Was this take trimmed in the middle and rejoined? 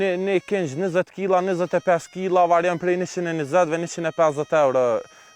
no; 0 cuts

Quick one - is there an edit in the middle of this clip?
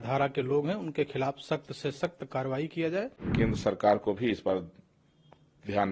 yes; 1 cut; at 3.2 s

